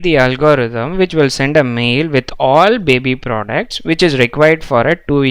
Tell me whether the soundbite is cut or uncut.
uncut